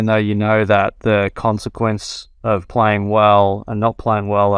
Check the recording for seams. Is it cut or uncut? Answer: uncut